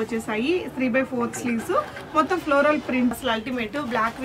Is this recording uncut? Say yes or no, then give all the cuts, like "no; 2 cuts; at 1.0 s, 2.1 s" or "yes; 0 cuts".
no; 1 cut; at 3.1 s